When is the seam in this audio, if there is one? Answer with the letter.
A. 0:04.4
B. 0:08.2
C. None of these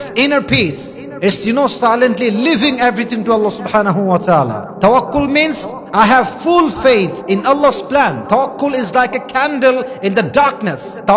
B